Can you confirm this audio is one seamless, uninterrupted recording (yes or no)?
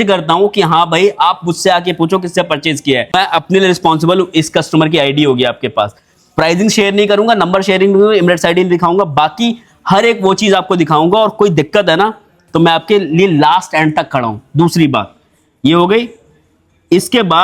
yes